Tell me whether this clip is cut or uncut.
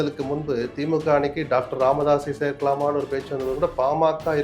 uncut